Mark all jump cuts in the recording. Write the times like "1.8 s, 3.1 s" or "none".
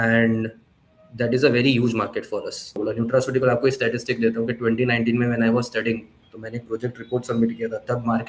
2.8 s

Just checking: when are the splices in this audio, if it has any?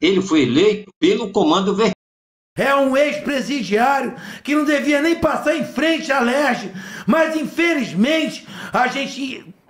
0.9 s, 2.0 s

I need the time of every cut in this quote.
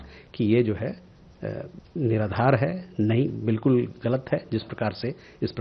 none

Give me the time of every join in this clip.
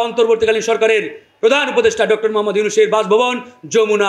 none

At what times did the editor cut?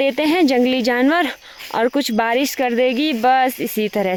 none

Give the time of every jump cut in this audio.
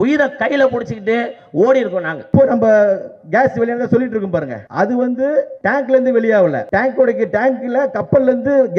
2.2 s, 4.6 s, 5.5 s, 6.6 s

